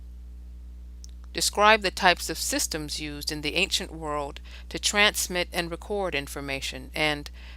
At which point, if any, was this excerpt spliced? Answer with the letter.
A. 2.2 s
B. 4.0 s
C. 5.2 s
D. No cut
A